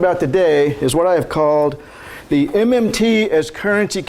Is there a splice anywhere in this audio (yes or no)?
no